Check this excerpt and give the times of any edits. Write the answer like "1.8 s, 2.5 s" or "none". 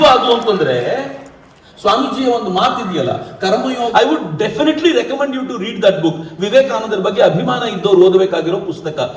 3.9 s